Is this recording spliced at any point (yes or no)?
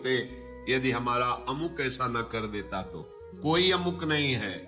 no